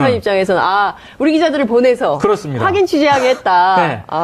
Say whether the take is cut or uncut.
cut